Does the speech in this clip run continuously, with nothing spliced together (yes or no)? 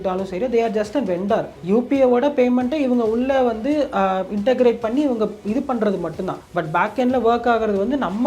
no